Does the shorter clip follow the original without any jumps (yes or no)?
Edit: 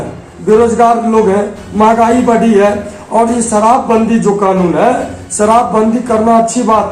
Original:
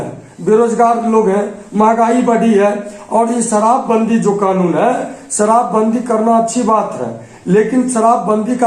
yes